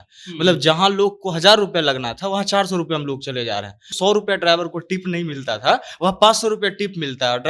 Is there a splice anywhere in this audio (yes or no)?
yes